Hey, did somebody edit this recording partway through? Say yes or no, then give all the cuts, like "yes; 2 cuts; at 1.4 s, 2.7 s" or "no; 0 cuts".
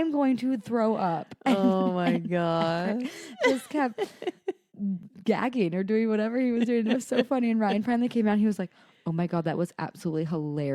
no; 0 cuts